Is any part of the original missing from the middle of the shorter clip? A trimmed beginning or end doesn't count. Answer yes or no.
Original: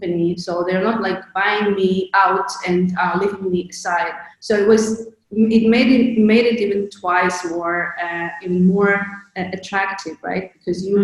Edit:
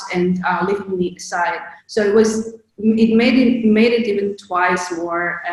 no